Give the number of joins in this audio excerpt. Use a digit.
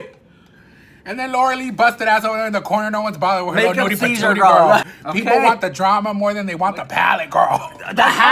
1